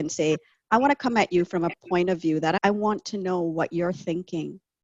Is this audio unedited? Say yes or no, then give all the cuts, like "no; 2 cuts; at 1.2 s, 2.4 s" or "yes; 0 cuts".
no; 1 cut; at 2.6 s